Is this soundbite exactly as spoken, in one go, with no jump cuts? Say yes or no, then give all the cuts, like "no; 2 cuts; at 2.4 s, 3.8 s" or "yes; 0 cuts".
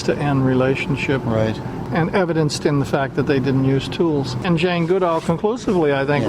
no; 2 cuts; at 1.9 s, 4.4 s